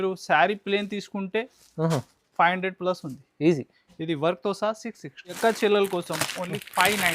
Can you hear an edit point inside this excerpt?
yes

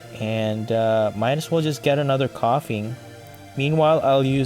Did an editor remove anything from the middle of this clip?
yes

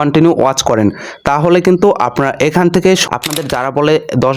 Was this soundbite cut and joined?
yes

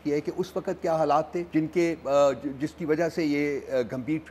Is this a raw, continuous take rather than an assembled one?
no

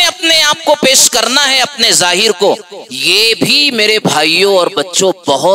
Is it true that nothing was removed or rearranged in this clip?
yes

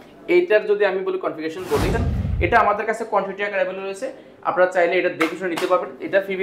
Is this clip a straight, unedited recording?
no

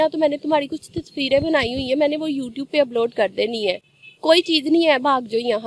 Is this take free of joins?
yes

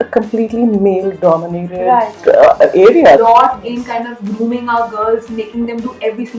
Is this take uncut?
no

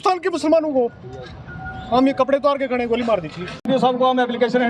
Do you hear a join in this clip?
yes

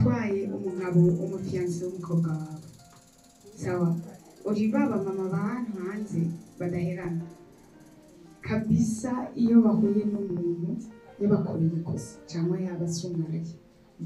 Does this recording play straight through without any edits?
yes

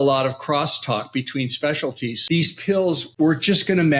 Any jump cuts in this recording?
yes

